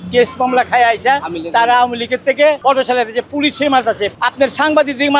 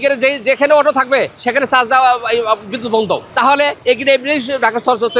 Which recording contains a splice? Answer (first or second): first